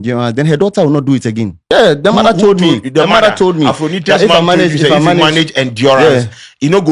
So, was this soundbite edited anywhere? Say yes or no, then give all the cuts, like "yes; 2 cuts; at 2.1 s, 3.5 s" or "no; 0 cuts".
yes; 1 cut; at 1.6 s